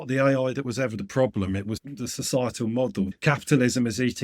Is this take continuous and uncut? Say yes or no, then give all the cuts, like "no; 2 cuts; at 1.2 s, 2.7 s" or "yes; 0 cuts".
no; 2 cuts; at 1.9 s, 3.1 s